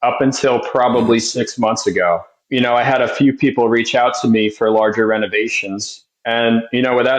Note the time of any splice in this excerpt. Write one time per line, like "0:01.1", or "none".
0:02.4